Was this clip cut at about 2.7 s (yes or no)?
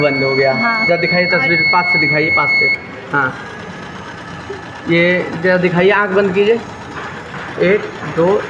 no